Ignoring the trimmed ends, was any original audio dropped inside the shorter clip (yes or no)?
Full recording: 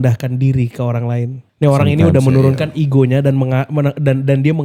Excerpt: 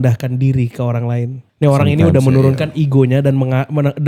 no